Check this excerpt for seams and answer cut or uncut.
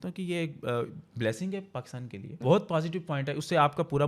cut